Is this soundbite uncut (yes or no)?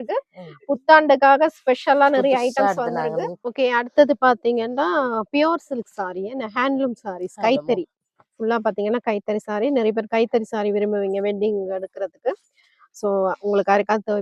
no